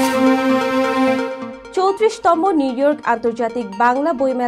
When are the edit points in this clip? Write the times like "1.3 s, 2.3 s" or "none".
1.5 s